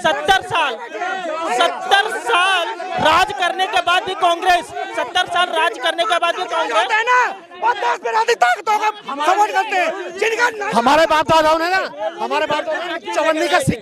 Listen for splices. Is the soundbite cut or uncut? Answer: uncut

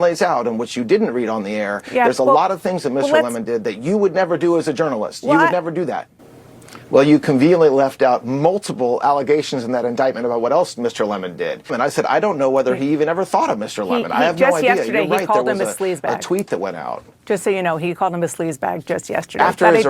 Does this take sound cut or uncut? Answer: cut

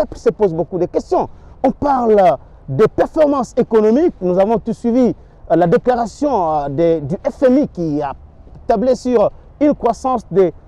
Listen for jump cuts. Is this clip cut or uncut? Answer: uncut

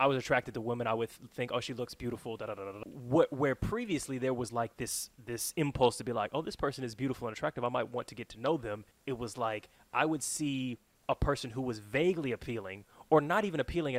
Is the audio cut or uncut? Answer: cut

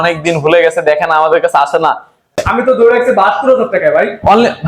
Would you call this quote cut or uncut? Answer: cut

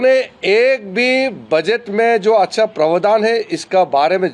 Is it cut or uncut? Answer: uncut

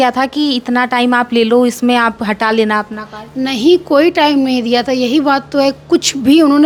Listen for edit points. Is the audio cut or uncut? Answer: uncut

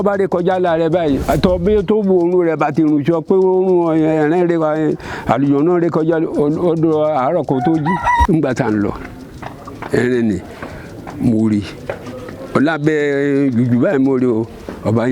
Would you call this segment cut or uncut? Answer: cut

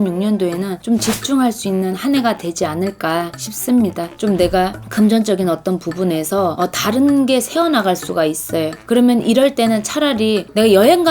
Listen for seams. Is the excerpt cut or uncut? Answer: cut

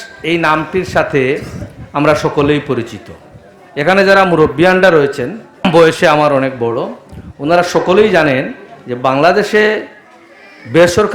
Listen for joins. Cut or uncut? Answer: cut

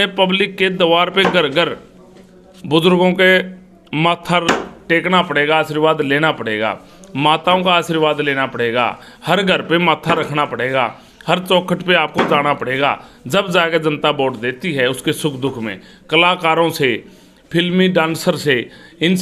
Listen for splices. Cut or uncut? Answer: uncut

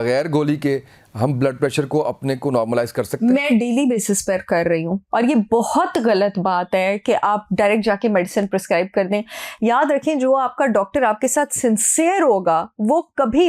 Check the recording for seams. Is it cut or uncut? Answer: uncut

